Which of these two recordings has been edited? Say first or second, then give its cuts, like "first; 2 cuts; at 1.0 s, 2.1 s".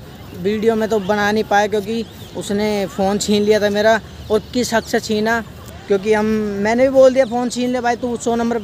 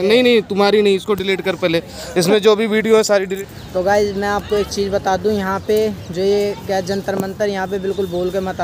second; 1 cut; at 3.3 s